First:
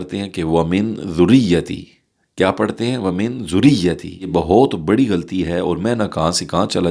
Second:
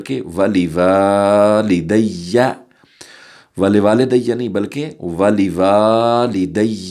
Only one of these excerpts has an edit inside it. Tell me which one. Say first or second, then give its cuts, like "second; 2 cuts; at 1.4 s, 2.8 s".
first; 1 cut; at 4.3 s